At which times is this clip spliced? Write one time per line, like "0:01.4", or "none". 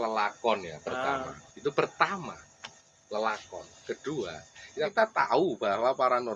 0:04.8